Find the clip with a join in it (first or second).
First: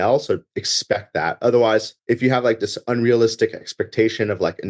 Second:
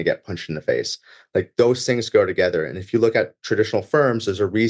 first